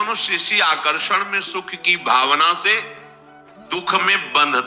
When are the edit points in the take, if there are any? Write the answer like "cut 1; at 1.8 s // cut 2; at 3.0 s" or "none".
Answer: none